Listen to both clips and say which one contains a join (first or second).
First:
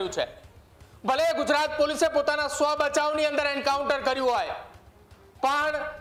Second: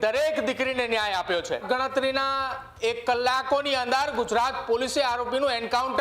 second